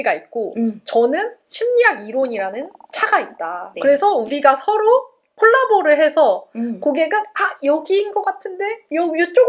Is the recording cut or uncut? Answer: cut